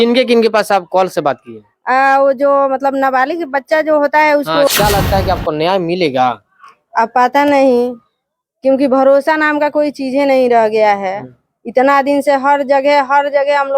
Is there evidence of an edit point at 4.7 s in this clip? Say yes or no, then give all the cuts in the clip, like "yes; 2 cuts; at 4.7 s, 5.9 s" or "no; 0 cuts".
yes; 1 cut; at 4.7 s